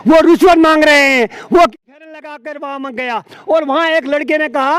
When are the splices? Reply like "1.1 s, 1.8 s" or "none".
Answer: 1.7 s